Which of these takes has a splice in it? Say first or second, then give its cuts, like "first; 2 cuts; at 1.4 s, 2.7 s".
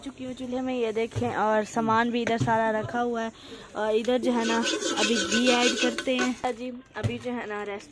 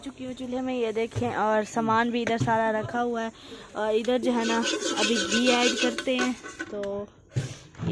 first; 1 cut; at 6.4 s